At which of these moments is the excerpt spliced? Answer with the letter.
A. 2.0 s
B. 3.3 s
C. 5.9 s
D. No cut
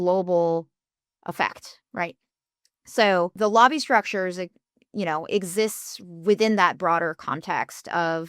B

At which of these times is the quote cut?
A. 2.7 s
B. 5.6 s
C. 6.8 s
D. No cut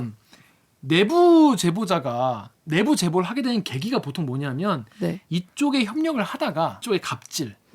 C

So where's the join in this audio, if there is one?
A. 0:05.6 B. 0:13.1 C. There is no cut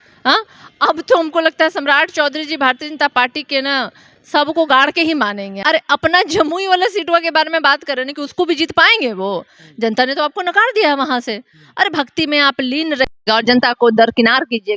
A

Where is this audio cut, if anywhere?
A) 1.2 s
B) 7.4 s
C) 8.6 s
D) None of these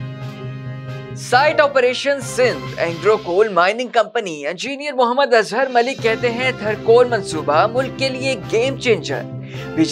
A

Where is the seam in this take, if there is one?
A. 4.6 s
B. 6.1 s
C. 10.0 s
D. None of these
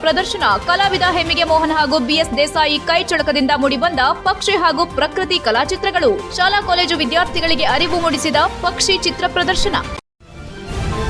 C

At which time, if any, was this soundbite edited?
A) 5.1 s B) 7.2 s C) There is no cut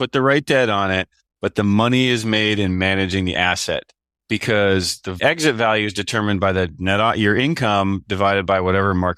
A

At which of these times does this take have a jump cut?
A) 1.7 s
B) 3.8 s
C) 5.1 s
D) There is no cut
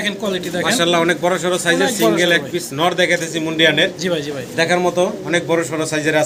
D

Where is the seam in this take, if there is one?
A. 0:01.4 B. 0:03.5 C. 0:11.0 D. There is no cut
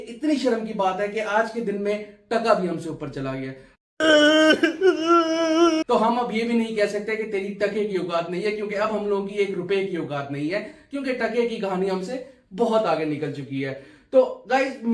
D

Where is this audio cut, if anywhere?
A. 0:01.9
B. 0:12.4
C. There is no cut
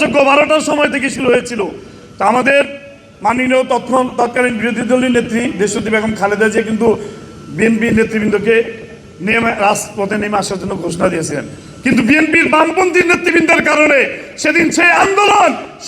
C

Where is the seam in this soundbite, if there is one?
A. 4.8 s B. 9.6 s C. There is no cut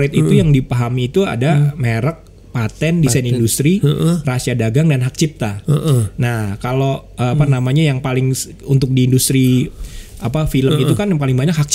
C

